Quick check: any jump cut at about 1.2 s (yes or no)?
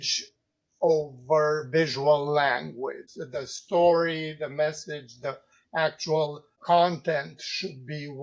no